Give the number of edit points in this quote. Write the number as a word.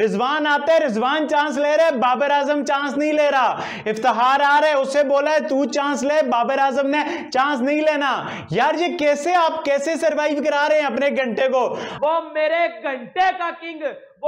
one